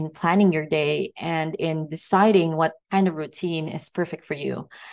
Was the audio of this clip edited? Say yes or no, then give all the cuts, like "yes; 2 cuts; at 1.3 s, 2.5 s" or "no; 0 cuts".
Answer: yes; 1 cut; at 2.8 s